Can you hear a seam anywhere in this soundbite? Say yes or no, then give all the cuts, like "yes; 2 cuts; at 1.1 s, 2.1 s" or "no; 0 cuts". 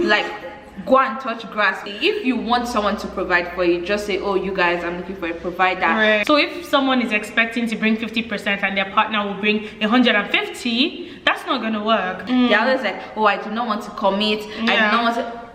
yes; 3 cuts; at 1.9 s, 6.2 s, 12.2 s